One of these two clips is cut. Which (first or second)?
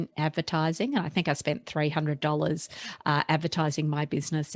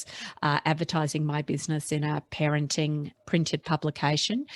second